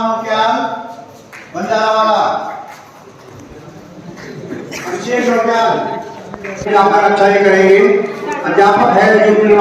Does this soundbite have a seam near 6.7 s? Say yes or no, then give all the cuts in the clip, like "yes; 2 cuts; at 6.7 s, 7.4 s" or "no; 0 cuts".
yes; 1 cut; at 6.7 s